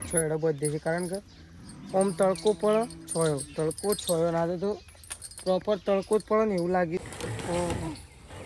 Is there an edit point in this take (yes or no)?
yes